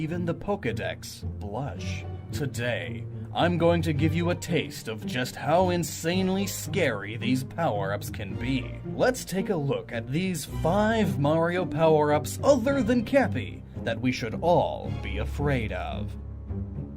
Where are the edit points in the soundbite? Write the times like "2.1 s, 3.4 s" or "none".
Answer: 14.3 s